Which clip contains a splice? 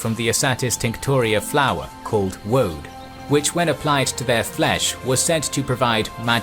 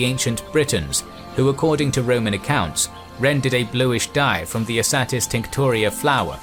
first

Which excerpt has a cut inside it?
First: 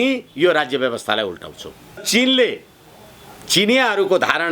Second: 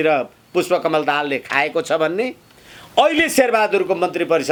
first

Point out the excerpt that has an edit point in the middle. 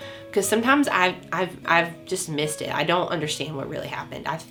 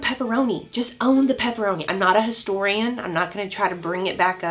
second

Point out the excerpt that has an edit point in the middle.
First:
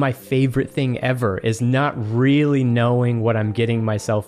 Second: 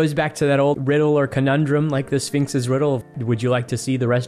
second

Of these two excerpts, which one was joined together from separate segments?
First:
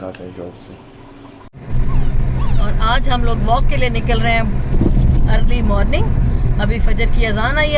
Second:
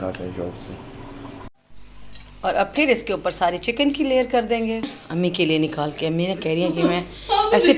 second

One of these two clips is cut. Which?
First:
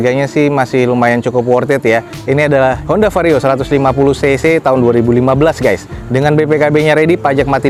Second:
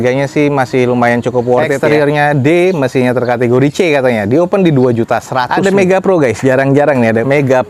second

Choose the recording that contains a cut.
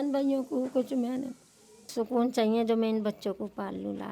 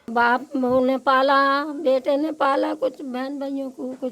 first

